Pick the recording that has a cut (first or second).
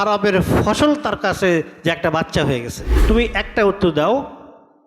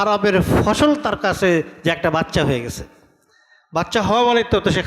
first